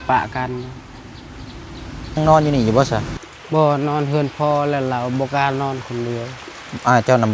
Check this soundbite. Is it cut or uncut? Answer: cut